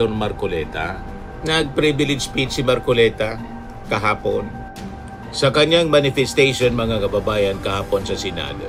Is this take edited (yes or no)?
no